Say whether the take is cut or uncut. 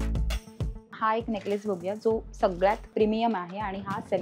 cut